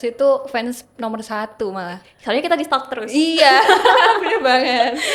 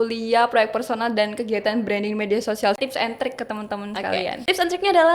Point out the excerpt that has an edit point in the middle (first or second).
second